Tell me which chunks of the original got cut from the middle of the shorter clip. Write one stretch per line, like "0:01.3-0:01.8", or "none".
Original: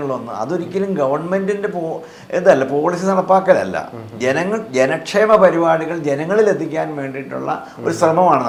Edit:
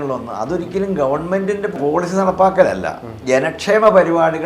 0:01.8-0:02.7
0:04.1-0:04.6